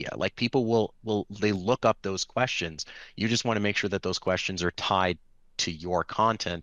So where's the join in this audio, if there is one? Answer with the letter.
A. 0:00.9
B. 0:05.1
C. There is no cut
C